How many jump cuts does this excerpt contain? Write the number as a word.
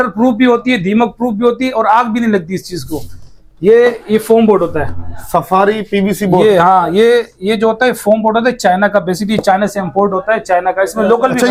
zero